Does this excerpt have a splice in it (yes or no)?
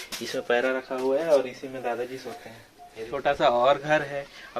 yes